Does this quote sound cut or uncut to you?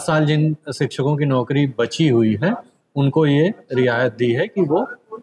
uncut